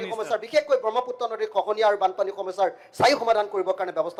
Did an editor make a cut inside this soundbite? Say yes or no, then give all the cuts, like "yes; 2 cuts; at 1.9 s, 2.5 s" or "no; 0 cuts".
no; 0 cuts